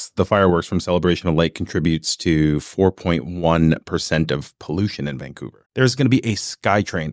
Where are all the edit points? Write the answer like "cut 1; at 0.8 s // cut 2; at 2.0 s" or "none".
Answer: cut 1; at 5.5 s